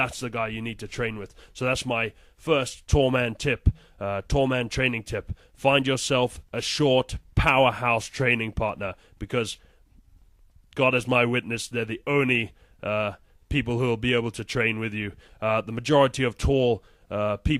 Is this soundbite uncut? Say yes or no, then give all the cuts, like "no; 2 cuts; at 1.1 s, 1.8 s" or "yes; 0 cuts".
yes; 0 cuts